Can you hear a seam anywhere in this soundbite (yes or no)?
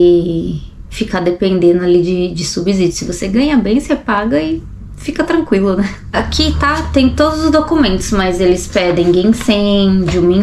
yes